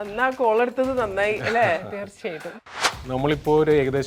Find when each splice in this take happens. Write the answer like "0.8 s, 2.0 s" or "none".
2.5 s

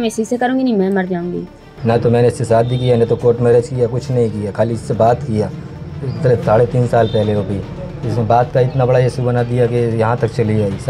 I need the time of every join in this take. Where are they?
1.7 s

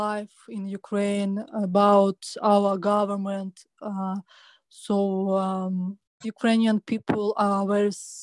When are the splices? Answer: 6.3 s

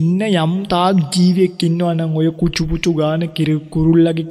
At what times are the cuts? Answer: none

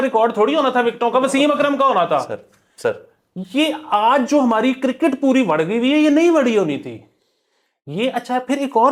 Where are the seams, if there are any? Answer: none

